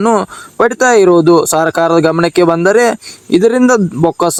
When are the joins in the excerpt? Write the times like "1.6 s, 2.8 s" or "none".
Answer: none